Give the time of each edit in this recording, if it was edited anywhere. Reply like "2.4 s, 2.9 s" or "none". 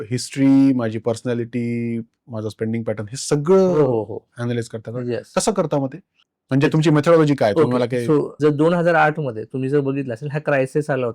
8.3 s